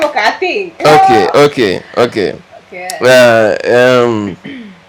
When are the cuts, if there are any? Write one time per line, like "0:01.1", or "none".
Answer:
none